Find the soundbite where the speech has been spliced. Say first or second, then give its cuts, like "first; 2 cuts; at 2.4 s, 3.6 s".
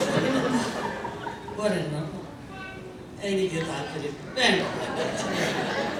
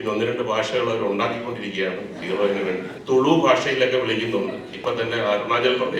second; 1 cut; at 2.9 s